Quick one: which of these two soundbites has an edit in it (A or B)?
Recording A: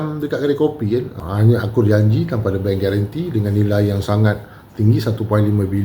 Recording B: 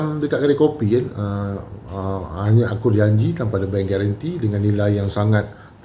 A